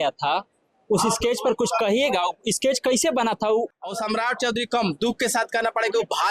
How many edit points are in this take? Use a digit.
1